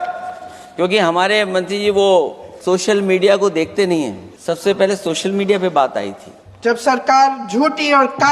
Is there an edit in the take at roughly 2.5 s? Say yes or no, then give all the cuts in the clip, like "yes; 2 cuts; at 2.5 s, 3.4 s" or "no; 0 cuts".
yes; 3 cuts; at 2.5 s, 4.3 s, 6.4 s